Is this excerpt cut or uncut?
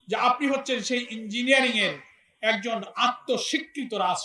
uncut